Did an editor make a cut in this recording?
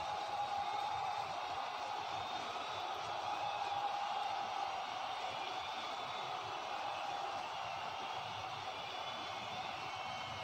no; 0 cuts

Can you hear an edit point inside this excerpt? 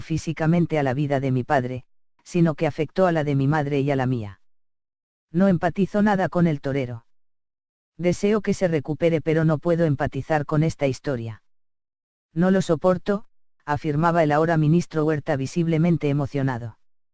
no; 0 cuts

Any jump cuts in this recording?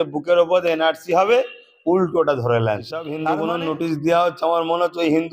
yes; 1 cut; at 3.1 s

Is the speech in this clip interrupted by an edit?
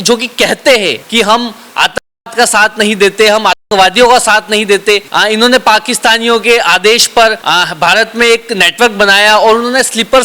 yes; 3 cuts; at 1.0 s, 5.1 s, 7.4 s

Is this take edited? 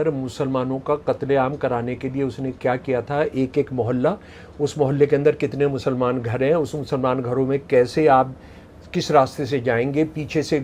no; 0 cuts

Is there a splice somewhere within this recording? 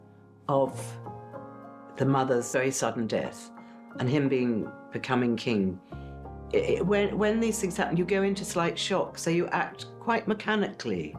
yes; 1 cut; at 2.5 s

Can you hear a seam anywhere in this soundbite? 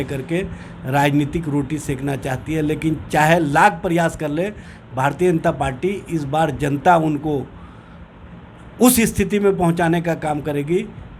no; 0 cuts

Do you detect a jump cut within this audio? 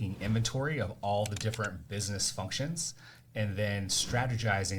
no; 0 cuts

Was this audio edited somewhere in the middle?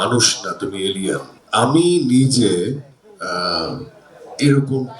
yes; 1 cut; at 1.4 s

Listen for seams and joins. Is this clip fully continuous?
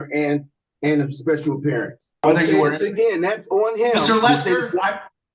no; 1 cut; at 2.2 s

